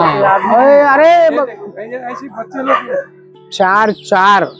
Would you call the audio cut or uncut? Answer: cut